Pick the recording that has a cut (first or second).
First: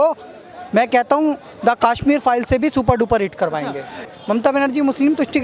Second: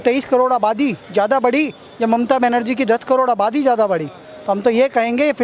first